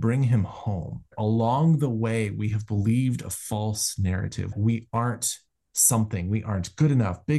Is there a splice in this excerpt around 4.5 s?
yes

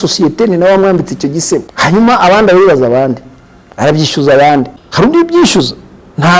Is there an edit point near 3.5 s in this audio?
no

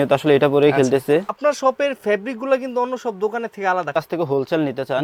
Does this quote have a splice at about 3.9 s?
yes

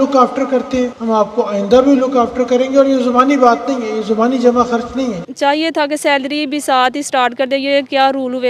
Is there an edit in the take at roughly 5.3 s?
yes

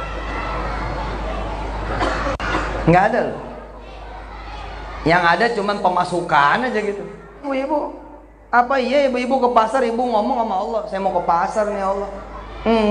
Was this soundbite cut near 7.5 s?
yes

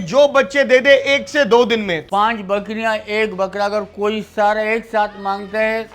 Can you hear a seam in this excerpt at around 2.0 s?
yes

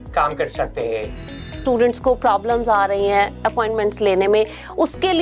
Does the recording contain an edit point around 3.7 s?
no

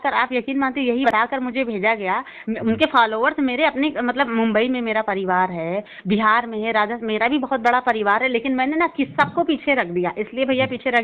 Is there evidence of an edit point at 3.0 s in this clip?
no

